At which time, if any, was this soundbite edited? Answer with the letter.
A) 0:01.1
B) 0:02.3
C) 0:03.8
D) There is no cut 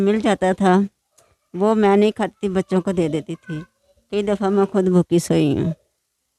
D